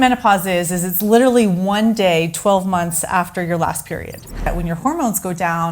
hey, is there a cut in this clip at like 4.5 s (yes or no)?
yes